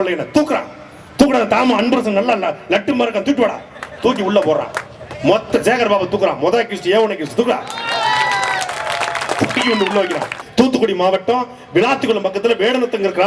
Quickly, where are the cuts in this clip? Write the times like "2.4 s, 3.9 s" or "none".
10.4 s